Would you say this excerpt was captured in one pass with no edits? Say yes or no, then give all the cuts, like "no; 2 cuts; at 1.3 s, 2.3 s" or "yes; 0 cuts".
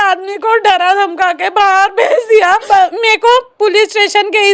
no; 1 cut; at 2.7 s